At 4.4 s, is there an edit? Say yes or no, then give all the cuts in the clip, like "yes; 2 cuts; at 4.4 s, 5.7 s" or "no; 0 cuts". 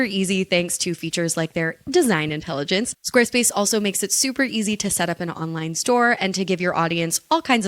no; 1 cut; at 2.9 s